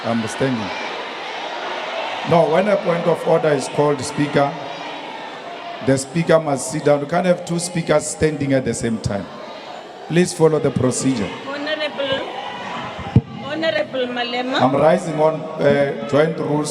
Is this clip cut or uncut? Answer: cut